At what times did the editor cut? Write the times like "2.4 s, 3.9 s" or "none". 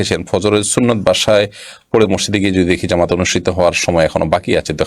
none